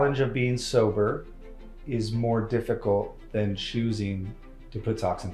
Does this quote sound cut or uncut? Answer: uncut